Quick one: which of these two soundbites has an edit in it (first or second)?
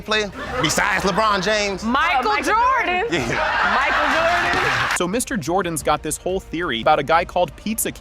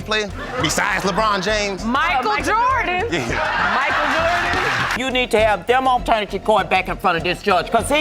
second